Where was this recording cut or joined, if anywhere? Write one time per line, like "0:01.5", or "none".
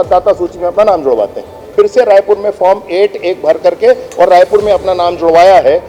0:01.6